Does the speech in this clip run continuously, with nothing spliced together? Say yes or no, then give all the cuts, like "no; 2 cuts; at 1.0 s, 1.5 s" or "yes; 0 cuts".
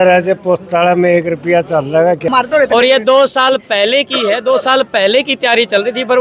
no; 1 cut; at 2.3 s